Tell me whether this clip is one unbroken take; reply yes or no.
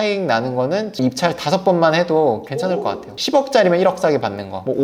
yes